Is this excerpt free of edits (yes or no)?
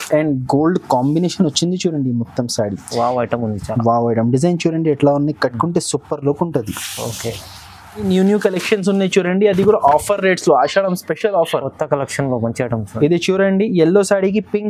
no